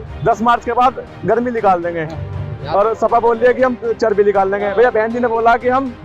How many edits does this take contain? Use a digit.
0